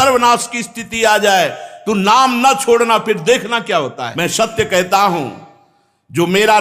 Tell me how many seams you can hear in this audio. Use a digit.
1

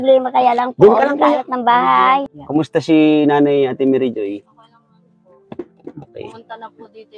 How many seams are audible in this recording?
1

